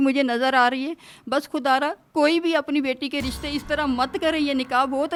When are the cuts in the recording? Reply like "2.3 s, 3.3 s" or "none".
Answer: none